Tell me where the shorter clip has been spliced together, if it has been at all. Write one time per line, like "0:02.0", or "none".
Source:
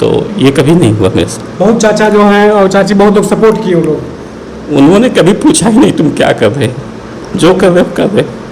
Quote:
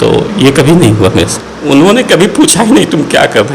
0:01.4